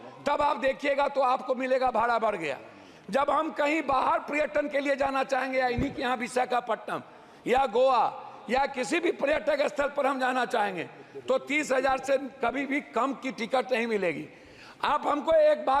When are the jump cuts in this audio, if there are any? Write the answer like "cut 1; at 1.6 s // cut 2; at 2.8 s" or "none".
none